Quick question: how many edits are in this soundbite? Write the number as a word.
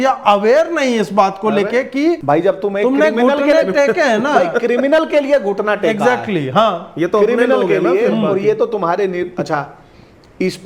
one